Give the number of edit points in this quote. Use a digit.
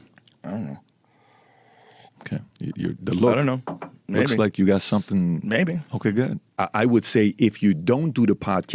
1